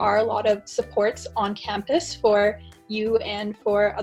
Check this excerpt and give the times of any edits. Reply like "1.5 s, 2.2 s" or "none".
none